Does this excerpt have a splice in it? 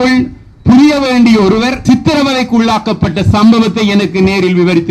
yes; 1 cut; at 1.8 s

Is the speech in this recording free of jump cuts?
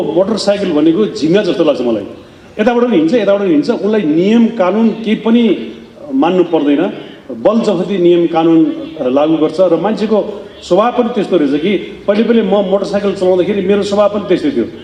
yes; 0 cuts

